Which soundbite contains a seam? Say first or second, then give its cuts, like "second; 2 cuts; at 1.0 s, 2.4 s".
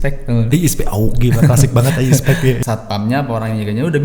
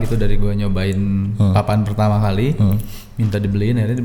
first; 1 cut; at 2.6 s